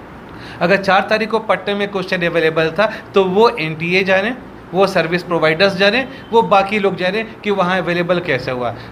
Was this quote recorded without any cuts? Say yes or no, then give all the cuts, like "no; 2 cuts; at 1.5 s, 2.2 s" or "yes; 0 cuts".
yes; 0 cuts